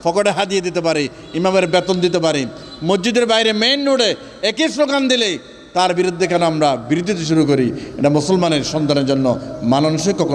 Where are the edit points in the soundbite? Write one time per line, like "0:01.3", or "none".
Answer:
none